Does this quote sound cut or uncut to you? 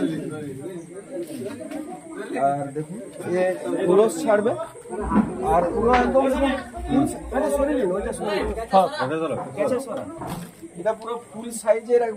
uncut